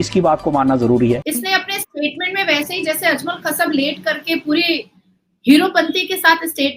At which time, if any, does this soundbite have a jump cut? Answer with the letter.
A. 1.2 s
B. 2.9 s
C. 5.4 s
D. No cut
A